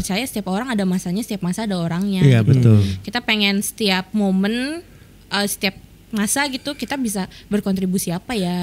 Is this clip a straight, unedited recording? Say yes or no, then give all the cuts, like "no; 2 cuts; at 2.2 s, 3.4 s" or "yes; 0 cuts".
yes; 0 cuts